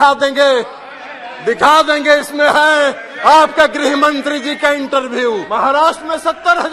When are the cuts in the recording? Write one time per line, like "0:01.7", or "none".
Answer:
0:05.4